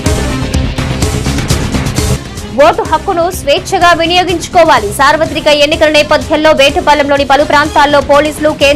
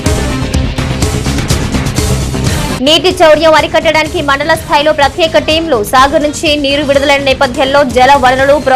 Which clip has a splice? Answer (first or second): second